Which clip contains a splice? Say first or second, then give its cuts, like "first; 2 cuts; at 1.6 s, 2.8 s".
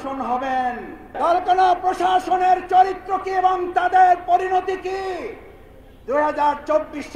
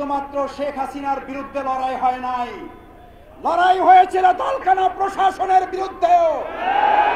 first; 1 cut; at 1.1 s